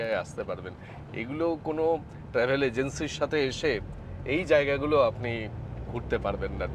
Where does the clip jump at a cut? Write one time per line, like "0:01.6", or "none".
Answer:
none

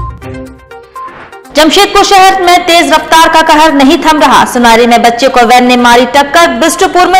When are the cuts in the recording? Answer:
0:01.1

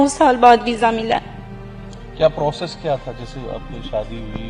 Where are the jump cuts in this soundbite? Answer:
none

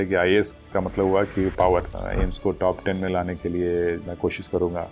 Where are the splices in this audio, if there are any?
0:01.9

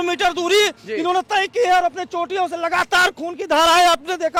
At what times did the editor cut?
none

